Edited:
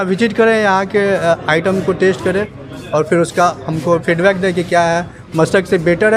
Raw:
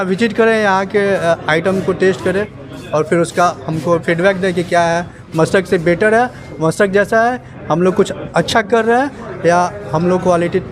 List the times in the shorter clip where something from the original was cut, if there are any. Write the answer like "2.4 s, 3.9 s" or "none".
none